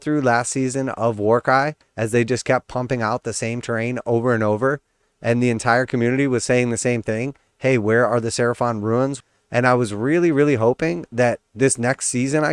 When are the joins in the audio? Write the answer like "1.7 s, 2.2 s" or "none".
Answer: 9.2 s, 11.5 s